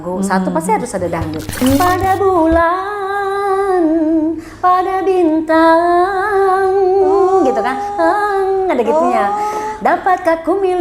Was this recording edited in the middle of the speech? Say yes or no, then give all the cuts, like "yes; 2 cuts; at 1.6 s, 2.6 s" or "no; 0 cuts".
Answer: yes; 1 cut; at 1.5 s